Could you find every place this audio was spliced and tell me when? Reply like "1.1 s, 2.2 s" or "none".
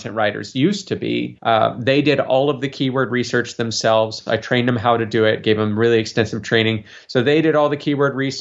1.3 s